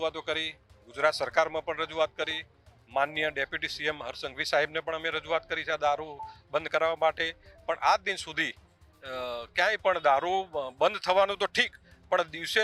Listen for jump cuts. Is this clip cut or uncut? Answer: uncut